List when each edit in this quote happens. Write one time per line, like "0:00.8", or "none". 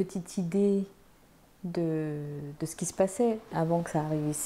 0:03.5